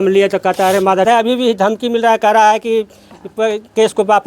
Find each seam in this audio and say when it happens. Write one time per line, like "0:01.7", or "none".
0:01.0